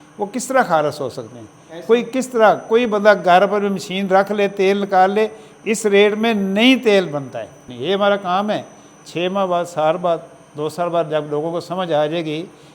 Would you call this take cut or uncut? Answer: cut